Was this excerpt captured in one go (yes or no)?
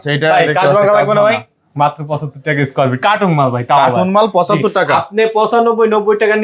yes